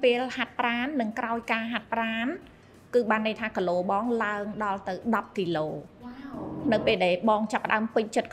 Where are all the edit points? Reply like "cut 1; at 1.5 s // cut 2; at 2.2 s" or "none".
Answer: cut 1; at 6.6 s

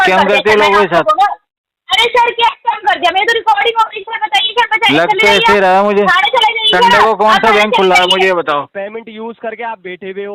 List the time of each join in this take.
cut 1; at 8.7 s

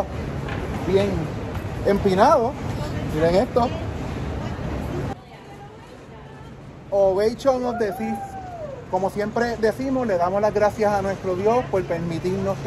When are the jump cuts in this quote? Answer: cut 1; at 5.1 s

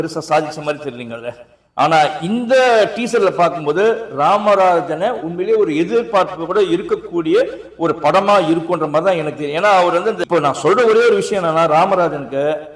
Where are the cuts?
cut 1; at 10.2 s

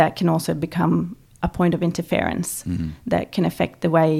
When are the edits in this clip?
cut 1; at 1.2 s

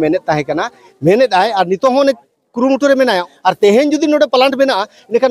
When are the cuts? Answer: cut 1; at 3.2 s

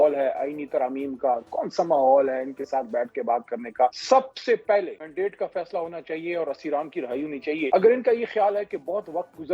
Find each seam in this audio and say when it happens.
cut 1; at 4.0 s // cut 2; at 5.0 s // cut 3; at 7.7 s

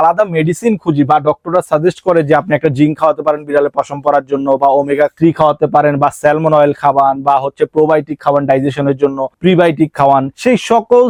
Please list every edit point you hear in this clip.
none

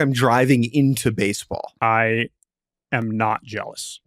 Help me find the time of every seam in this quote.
cut 1; at 1.7 s

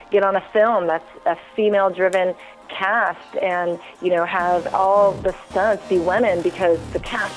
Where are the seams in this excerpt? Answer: none

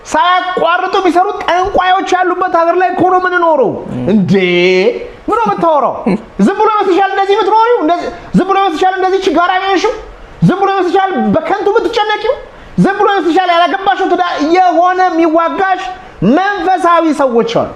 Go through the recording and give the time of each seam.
none

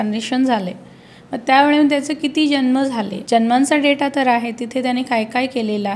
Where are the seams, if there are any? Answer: cut 1; at 3.2 s

